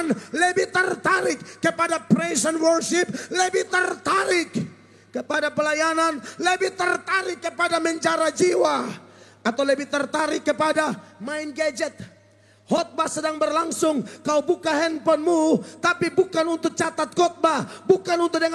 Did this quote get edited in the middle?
no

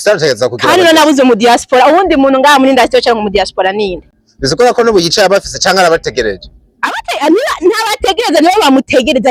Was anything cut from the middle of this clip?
no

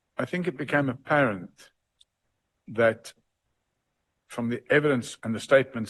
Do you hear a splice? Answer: no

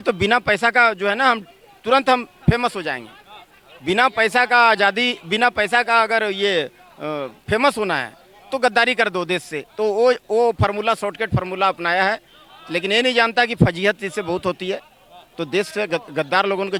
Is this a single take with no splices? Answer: yes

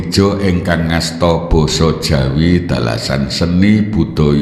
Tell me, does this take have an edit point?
no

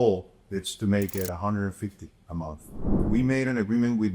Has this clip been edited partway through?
yes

